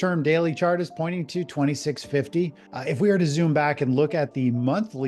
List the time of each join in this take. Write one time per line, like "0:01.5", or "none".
0:02.7